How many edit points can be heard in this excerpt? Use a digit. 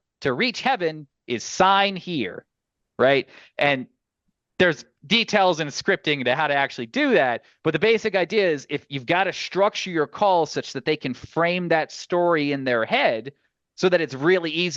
0